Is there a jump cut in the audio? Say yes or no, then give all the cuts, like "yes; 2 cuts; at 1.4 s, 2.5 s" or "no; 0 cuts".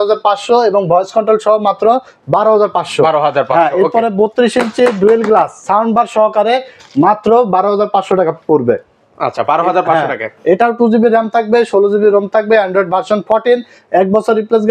no; 0 cuts